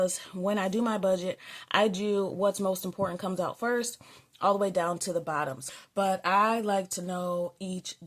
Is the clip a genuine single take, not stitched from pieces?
no; 1 cut; at 5.6 s

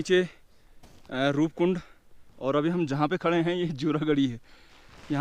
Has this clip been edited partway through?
no; 0 cuts

